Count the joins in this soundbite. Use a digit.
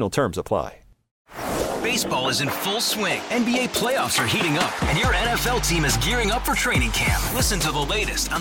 1